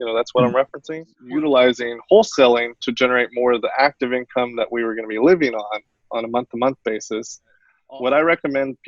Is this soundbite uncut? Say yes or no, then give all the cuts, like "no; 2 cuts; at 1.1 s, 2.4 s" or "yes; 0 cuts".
no; 2 cuts; at 1.1 s, 7.7 s